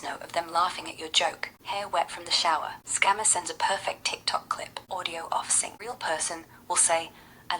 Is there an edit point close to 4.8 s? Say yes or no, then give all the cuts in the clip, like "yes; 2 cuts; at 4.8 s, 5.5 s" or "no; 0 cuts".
yes; 4 cuts; at 1.5 s, 2.8 s, 4.8 s, 5.7 s